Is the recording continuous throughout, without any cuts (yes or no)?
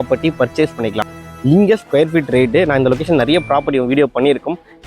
no